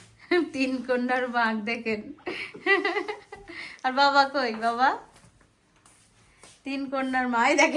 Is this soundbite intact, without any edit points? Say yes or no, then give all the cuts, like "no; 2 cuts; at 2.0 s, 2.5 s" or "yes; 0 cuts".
yes; 0 cuts